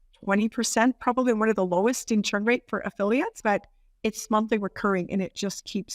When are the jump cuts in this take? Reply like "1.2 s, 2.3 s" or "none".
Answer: 3.4 s